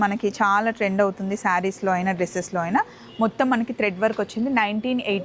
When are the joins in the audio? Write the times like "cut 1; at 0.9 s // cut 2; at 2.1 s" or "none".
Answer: none